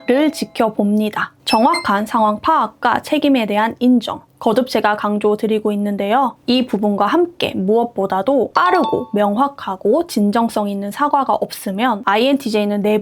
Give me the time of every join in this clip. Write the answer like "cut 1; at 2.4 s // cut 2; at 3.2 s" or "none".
none